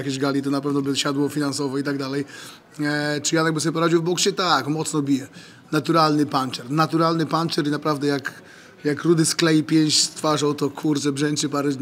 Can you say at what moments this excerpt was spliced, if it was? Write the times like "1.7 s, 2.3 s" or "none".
none